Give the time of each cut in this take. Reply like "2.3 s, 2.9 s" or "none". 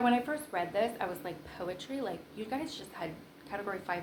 none